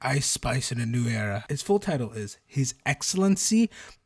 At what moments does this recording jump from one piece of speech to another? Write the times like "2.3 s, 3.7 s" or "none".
1.4 s